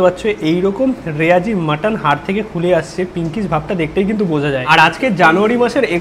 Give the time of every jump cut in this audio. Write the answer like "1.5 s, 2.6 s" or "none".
4.6 s